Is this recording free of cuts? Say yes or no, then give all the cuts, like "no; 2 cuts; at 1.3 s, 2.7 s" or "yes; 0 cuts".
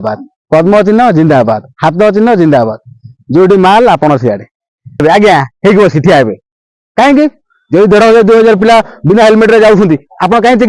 no; 1 cut; at 5.0 s